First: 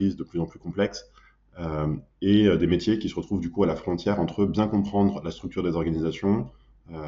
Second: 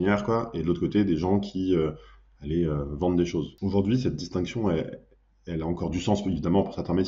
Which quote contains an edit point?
second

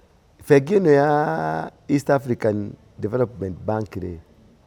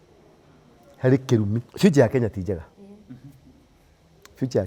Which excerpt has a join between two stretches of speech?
second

